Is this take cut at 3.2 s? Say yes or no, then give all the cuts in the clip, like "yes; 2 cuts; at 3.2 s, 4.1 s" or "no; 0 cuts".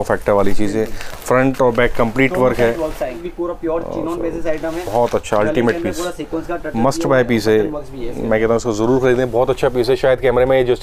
yes; 1 cut; at 3.2 s